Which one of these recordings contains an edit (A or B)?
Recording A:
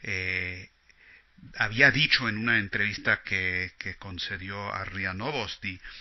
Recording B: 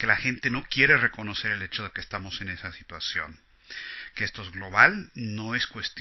A